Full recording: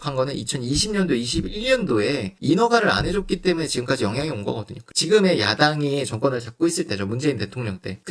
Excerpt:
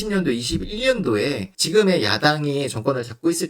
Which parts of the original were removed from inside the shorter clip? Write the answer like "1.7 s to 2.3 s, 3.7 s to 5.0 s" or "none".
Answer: 2.3 s to 4.8 s